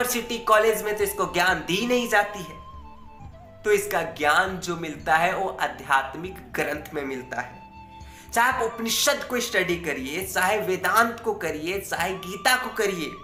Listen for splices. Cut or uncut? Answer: uncut